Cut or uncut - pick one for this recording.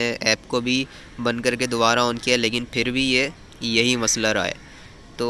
uncut